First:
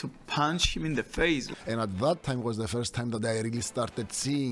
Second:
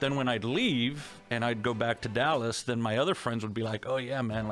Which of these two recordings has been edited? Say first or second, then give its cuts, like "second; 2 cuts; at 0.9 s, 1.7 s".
first; 1 cut; at 1.5 s